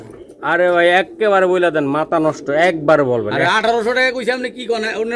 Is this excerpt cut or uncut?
uncut